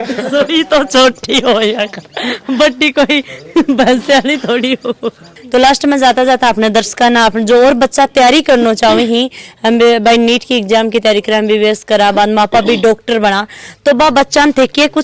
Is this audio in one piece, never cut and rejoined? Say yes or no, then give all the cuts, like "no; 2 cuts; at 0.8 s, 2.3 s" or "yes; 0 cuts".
yes; 0 cuts